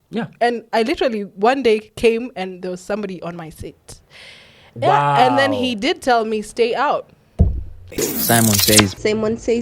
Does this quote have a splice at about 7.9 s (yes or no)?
yes